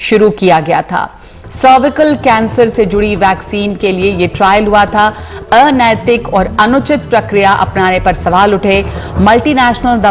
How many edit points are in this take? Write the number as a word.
zero